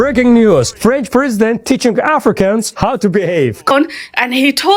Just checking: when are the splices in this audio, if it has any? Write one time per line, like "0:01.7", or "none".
0:03.7